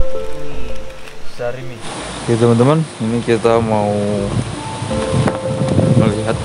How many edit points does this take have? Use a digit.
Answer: 1